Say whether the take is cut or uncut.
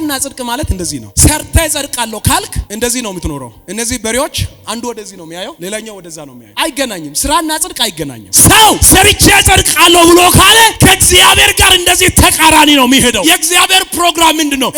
uncut